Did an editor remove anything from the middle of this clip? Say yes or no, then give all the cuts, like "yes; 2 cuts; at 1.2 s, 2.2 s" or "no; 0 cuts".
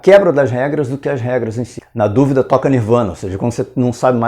yes; 1 cut; at 1.8 s